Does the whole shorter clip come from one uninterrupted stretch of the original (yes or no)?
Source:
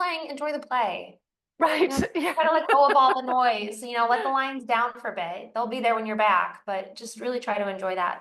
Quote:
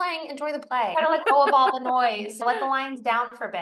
no